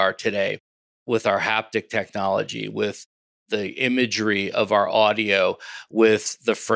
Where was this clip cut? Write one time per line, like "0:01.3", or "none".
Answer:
none